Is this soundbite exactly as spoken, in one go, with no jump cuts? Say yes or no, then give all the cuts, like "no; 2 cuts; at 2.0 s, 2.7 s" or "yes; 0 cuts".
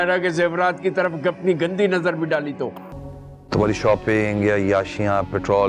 no; 1 cut; at 2.9 s